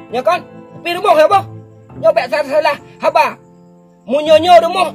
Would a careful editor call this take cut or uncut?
uncut